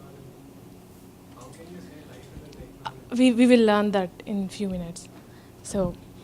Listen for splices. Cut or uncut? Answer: cut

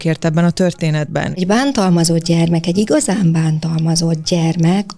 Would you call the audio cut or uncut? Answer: cut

